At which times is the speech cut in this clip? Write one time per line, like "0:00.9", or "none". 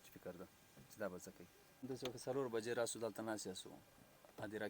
0:01.9